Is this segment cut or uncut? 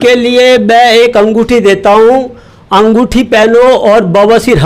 uncut